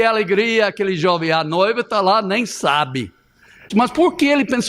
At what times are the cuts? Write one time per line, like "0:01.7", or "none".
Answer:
0:03.7